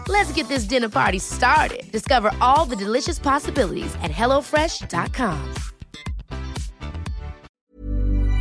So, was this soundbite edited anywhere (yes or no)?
yes